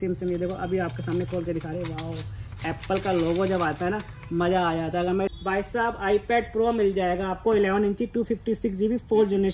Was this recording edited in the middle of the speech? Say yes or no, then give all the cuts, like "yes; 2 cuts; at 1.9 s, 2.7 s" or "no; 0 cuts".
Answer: yes; 1 cut; at 5.3 s